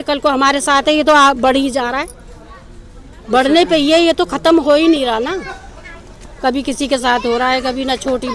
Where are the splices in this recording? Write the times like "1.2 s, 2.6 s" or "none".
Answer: none